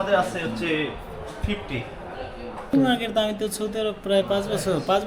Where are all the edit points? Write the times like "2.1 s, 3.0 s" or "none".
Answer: 2.7 s

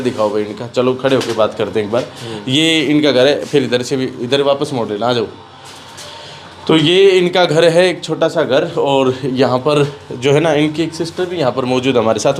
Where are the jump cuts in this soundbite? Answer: none

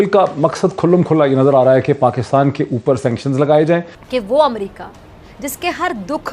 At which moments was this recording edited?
4.0 s

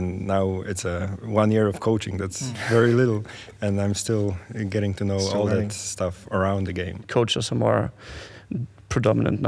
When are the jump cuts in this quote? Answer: 7.0 s

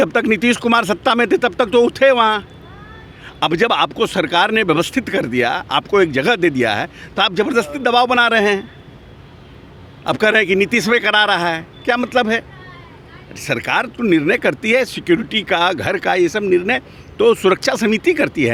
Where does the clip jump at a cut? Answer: none

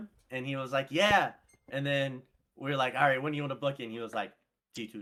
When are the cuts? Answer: none

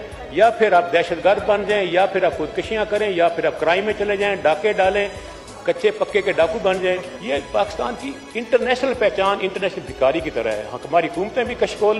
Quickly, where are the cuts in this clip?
7.1 s

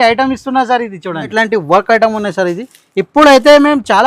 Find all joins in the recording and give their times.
1.3 s

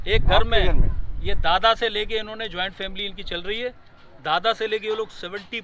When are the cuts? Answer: none

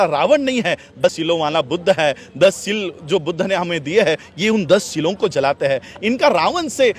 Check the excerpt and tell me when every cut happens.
1.0 s

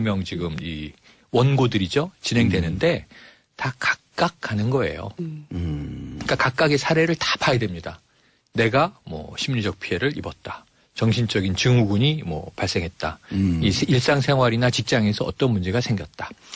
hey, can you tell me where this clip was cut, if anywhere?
none

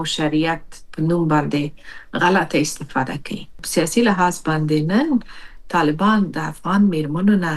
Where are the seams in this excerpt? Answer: 3.6 s

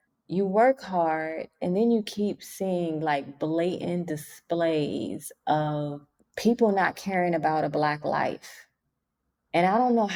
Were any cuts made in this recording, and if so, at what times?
none

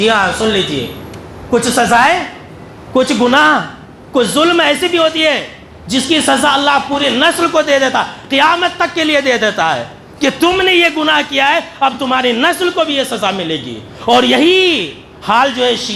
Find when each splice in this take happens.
none

